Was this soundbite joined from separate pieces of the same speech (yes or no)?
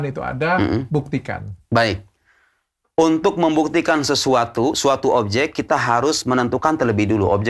no